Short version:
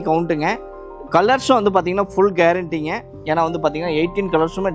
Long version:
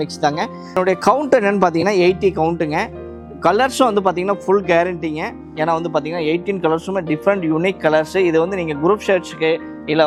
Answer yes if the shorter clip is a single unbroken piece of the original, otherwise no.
yes